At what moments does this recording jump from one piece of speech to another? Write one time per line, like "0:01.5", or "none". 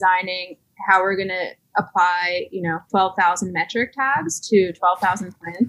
0:01.6
0:02.8